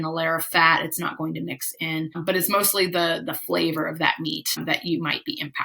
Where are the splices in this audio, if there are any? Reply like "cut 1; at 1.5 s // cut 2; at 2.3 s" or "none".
cut 1; at 2.2 s // cut 2; at 4.6 s